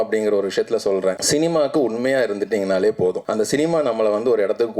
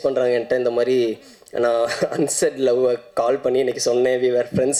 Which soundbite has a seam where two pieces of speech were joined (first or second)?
first